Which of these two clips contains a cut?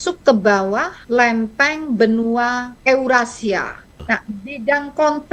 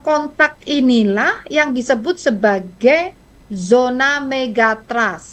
first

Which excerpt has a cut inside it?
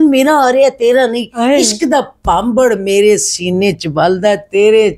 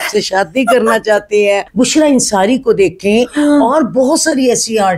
second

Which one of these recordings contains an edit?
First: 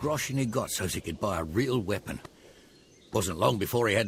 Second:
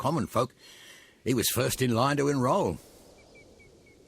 second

